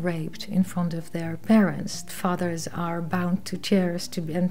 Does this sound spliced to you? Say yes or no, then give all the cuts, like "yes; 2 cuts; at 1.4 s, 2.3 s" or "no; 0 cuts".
yes; 1 cut; at 2.1 s